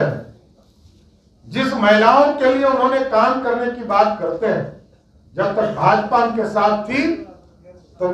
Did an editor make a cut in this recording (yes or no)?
no